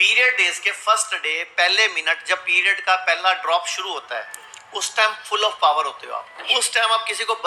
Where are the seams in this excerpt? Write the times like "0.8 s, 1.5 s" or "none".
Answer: 6.4 s